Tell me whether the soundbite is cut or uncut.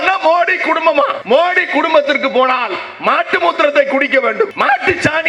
cut